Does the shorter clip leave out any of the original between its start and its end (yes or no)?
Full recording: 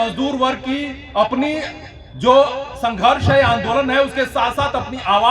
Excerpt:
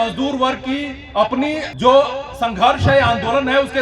yes